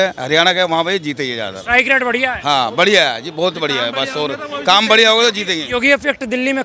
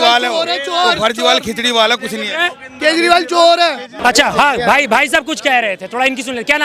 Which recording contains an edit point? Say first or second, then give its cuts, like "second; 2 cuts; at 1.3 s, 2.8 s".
second; 1 cut; at 3.9 s